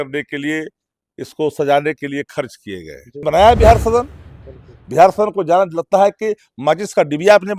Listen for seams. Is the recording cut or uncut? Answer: cut